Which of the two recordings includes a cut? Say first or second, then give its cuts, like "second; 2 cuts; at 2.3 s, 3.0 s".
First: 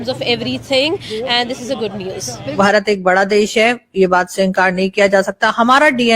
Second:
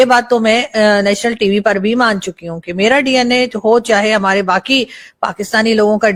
first; 1 cut; at 2.5 s